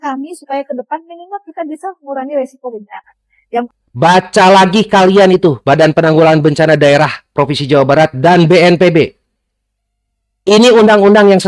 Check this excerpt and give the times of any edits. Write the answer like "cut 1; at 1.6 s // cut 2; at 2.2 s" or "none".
cut 1; at 3.7 s